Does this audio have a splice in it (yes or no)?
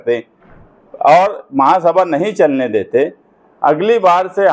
no